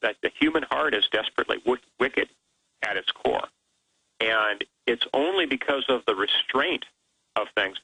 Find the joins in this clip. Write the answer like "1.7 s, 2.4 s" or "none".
none